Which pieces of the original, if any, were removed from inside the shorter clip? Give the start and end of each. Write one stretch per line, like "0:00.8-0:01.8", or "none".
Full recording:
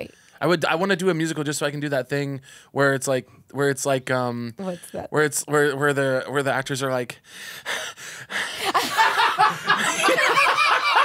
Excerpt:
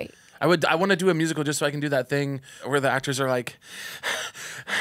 0:02.6-0:06.3

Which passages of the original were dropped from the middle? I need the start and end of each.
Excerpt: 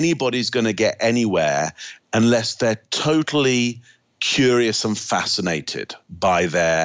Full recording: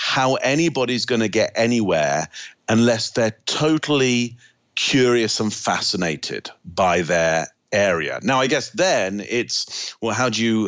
none

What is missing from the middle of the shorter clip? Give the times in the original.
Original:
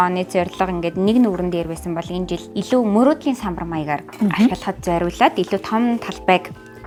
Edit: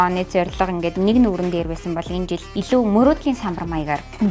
none

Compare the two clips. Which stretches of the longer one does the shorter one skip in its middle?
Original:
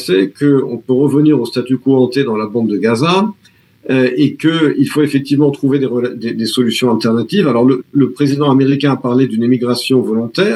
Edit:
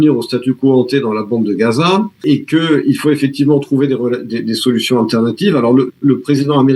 0:03.5-0:04.1

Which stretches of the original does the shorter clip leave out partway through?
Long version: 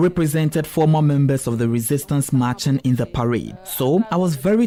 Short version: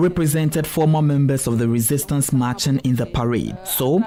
none

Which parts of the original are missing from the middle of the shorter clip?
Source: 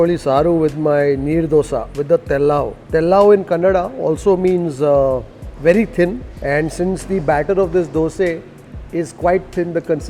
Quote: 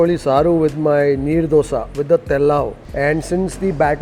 0:02.8-0:06.3

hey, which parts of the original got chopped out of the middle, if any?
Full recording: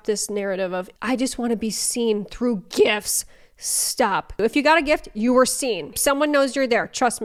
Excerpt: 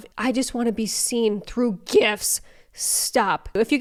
none

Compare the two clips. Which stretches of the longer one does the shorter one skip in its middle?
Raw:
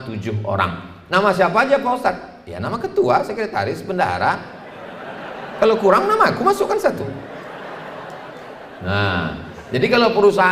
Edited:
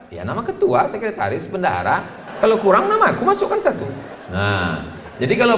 0:04.6-0:05.4
0:07.3-0:08.6

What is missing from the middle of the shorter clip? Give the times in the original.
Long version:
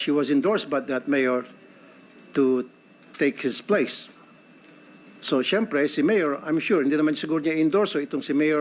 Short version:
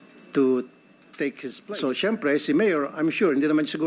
0:03.5-0:05.0

